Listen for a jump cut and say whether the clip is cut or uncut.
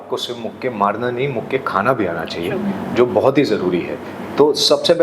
uncut